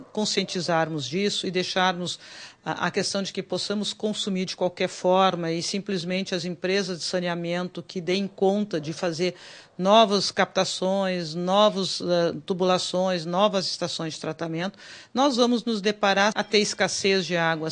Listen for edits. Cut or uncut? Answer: cut